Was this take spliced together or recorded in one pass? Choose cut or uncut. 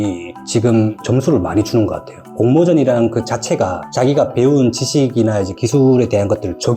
uncut